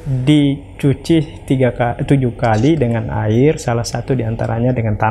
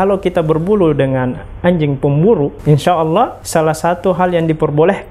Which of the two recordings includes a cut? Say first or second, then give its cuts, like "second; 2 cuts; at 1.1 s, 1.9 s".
second; 2 cuts; at 2.6 s, 3.4 s